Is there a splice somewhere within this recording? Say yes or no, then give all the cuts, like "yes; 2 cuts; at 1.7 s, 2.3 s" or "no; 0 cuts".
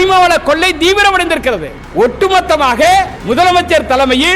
yes; 2 cuts; at 1.8 s, 3.2 s